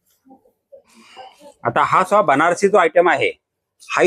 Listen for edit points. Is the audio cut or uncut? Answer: cut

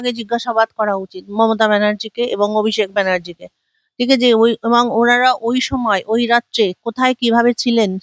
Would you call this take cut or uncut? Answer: uncut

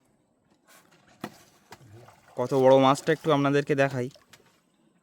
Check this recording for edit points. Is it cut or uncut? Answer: cut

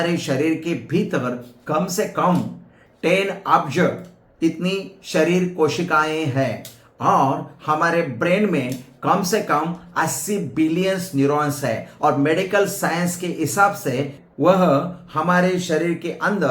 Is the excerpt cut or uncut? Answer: cut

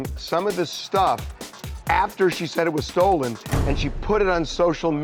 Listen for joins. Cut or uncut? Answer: uncut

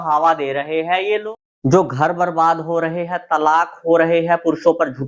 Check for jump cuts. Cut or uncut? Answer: cut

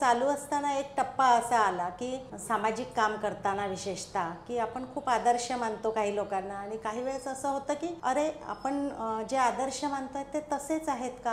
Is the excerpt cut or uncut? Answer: cut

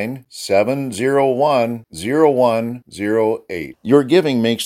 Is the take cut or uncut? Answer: uncut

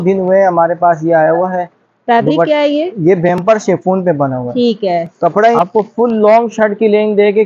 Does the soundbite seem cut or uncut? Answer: cut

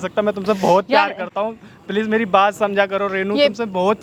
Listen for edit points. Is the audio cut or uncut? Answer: uncut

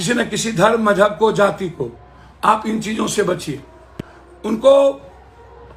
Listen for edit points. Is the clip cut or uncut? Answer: uncut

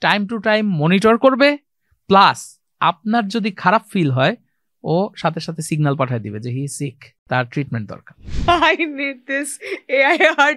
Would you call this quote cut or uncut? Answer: cut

